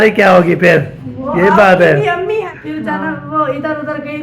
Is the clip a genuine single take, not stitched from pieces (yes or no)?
no